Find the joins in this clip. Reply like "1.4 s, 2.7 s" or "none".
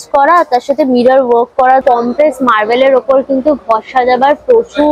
1.8 s